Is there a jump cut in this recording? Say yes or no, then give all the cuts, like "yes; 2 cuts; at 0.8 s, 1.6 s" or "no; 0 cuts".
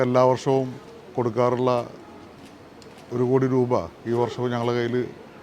no; 0 cuts